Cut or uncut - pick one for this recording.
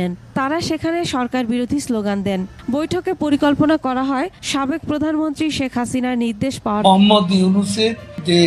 cut